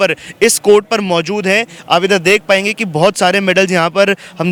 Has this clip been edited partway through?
no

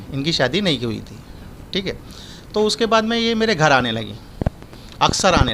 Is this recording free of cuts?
yes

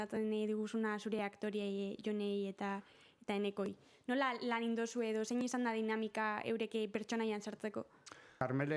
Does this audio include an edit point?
no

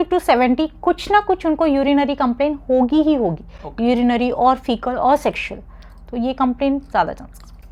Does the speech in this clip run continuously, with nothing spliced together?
yes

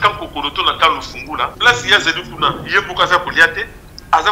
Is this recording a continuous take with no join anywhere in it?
no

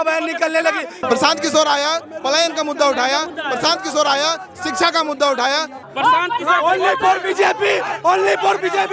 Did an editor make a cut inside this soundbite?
yes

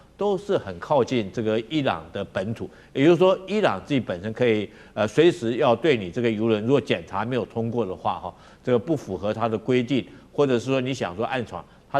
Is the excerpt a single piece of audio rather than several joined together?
yes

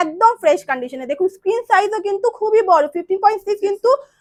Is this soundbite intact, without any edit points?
yes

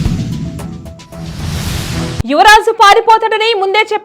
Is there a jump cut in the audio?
yes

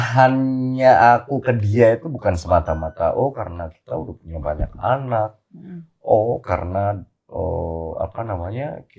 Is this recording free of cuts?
yes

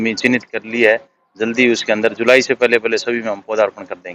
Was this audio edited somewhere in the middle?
no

